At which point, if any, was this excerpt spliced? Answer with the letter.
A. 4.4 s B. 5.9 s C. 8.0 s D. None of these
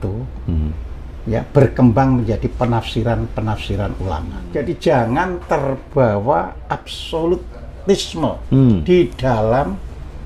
A